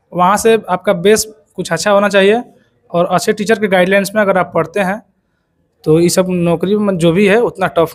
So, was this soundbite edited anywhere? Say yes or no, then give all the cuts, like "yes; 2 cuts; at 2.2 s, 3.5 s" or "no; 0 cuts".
no; 0 cuts